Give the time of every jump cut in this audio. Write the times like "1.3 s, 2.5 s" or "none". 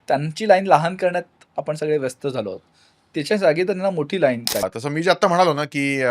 4.6 s